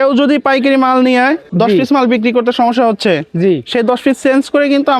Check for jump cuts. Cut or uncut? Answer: cut